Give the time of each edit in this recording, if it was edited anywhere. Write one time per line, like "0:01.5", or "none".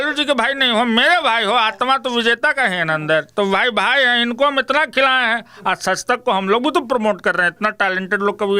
none

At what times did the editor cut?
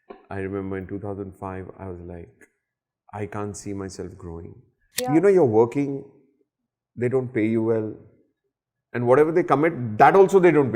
0:04.9

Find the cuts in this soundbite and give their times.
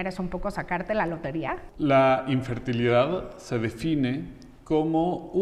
0:01.6

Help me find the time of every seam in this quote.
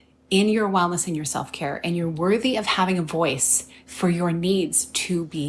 none

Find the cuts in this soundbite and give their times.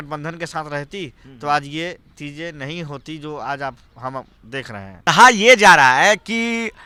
none

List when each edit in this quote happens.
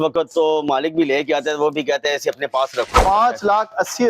0:03.0

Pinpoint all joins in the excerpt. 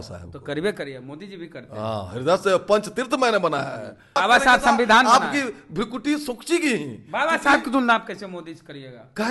0:04.2

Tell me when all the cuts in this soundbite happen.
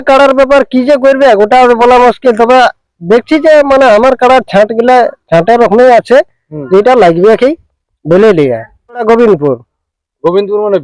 0:09.0

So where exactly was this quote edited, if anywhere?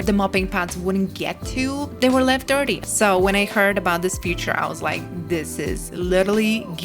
0:01.9
0:02.8

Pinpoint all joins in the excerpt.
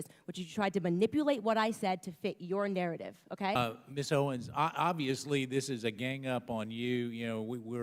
0:03.6

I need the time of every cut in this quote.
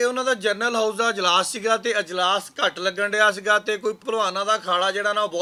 none

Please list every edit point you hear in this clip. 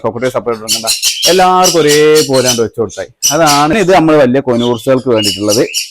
0:03.7

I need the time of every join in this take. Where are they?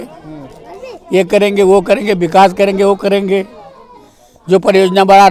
none

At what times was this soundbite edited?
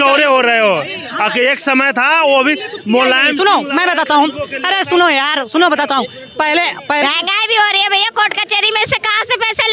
0:07.0

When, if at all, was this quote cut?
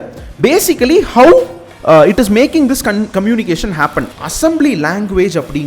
0:04.1

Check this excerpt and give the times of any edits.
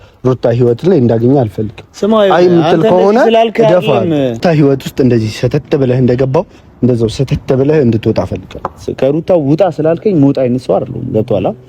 0:04.4
0:08.9

